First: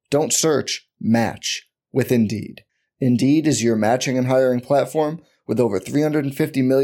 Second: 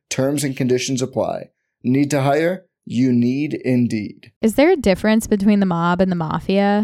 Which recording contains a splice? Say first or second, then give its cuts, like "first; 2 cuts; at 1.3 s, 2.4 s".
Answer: second; 1 cut; at 4.4 s